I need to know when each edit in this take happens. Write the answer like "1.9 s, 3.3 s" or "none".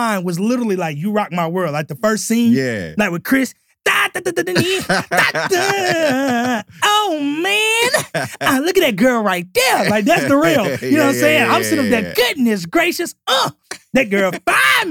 none

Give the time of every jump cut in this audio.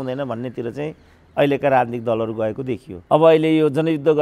2.9 s

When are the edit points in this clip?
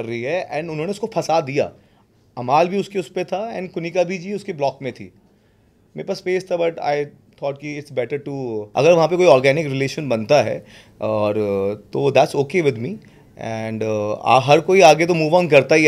8.6 s

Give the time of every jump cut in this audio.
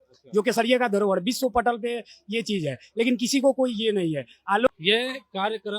4.7 s

